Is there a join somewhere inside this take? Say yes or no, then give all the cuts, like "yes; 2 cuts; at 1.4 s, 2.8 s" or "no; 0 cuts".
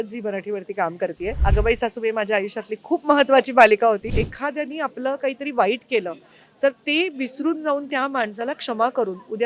yes; 2 cuts; at 1.4 s, 4.1 s